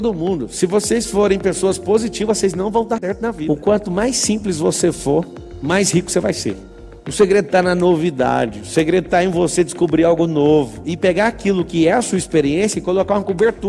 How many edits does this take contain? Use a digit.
2